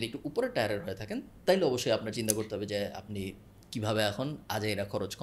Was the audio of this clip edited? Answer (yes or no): no